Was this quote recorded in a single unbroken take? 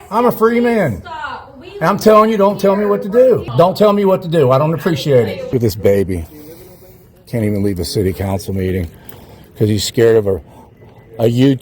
no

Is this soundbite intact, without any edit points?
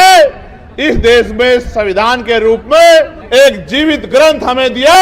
no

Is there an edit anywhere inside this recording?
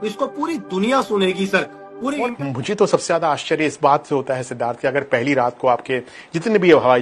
yes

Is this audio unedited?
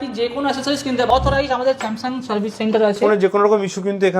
no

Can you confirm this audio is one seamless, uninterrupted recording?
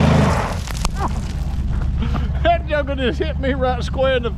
yes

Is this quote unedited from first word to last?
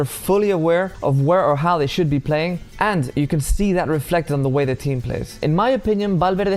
no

